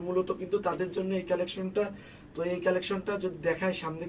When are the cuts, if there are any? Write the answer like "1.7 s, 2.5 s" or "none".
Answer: none